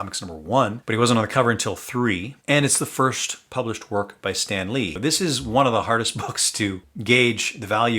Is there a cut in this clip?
yes; 1 cut; at 4.9 s

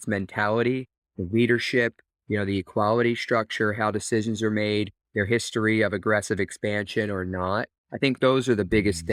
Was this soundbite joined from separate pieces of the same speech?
no; 0 cuts

